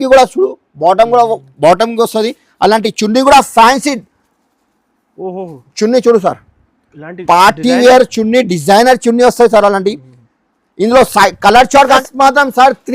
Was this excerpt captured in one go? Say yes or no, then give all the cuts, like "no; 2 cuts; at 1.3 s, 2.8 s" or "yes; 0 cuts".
no; 1 cut; at 12.0 s